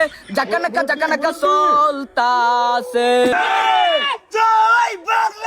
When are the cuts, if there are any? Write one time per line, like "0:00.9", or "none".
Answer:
0:03.3